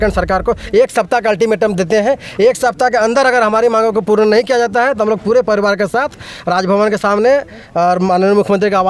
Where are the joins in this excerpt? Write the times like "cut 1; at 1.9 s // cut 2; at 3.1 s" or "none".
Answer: none